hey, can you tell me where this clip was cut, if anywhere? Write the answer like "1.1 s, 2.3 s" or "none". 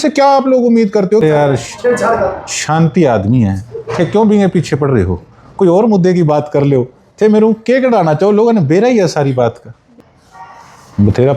1.2 s, 10.0 s